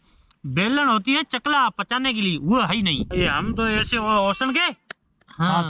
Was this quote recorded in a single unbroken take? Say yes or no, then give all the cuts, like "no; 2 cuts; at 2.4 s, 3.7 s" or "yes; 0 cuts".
no; 1 cut; at 3.1 s